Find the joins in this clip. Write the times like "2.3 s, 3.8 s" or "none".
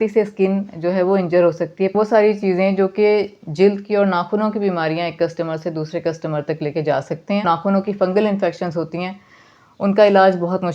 1.9 s, 7.4 s